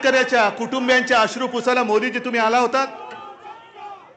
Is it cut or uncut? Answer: uncut